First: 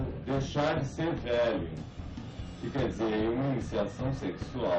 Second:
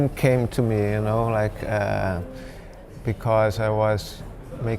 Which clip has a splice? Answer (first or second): second